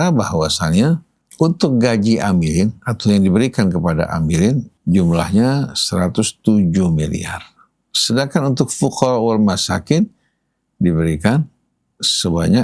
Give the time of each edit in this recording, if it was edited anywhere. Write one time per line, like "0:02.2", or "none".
0:01.2
0:04.7